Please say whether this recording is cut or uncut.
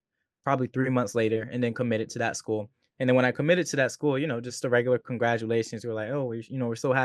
uncut